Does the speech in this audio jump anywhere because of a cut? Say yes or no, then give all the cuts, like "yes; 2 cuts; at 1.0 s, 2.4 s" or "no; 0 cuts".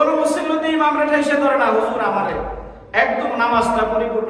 no; 0 cuts